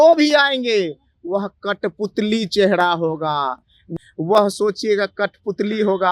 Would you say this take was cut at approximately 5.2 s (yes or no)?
no